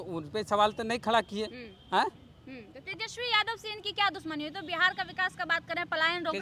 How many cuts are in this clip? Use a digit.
0